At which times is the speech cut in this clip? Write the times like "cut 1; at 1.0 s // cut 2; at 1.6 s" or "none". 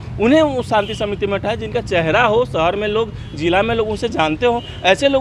none